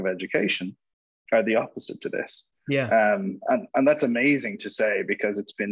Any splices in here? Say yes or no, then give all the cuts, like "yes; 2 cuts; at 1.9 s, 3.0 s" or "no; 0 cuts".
no; 0 cuts